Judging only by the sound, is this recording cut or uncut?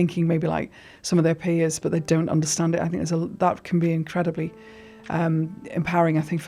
uncut